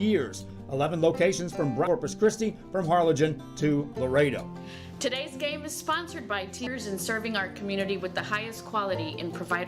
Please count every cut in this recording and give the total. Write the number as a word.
two